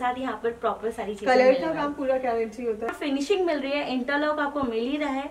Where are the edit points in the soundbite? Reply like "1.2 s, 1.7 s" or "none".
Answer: 2.9 s